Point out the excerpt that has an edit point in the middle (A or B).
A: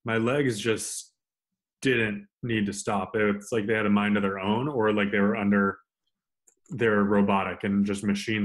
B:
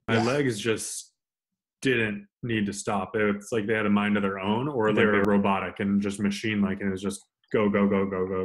B